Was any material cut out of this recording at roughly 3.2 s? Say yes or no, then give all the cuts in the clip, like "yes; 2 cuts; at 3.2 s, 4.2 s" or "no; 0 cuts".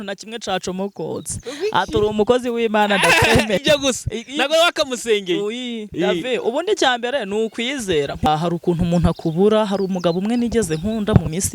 no; 2 cuts; at 5.9 s, 8.3 s